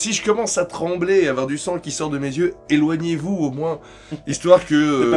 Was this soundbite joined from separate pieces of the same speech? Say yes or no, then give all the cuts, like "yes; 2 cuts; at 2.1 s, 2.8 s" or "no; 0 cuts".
no; 0 cuts